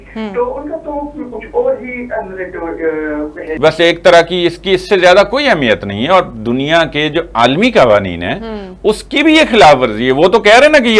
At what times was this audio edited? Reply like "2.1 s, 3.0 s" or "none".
3.4 s